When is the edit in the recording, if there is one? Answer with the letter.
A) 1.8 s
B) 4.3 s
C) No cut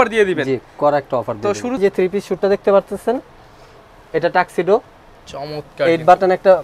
A